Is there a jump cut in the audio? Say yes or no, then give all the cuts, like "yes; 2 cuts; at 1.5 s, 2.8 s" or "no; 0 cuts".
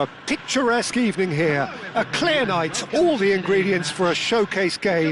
no; 0 cuts